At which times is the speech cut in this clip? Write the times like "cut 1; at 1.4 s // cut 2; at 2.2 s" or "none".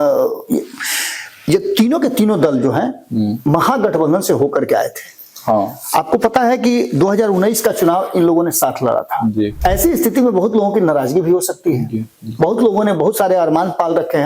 cut 1; at 9.5 s